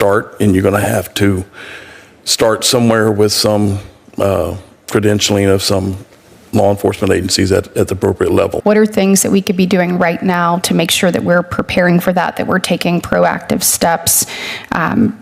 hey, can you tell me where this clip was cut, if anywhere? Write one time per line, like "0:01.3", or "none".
0:08.6